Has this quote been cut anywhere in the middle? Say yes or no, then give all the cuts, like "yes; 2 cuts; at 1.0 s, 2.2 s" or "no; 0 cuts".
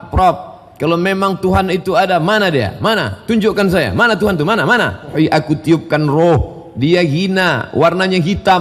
yes; 1 cut; at 5.1 s